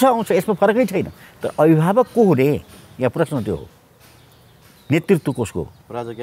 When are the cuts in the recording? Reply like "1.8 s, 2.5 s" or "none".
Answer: none